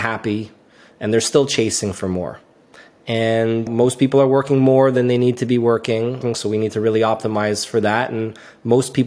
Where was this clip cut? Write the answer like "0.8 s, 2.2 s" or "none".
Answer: 3.7 s, 6.2 s